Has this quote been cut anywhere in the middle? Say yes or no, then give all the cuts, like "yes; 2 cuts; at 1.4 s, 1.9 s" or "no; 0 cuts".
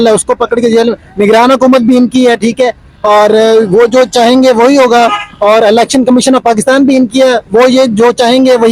no; 0 cuts